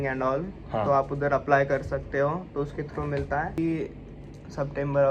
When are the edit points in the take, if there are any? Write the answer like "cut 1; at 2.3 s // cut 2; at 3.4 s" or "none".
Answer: cut 1; at 3.6 s